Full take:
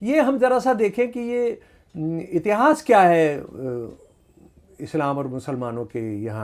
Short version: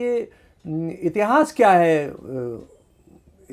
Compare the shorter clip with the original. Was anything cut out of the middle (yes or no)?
no